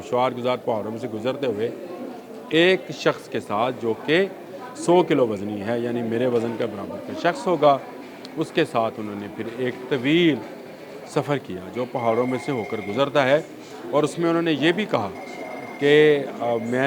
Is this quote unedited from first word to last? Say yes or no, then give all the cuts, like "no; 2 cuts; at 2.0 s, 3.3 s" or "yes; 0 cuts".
yes; 0 cuts